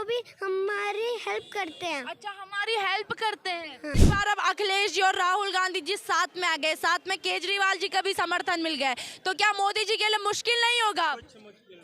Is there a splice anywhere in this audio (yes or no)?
yes